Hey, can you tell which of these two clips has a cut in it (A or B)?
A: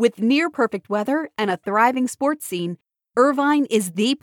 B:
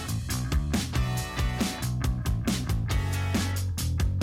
B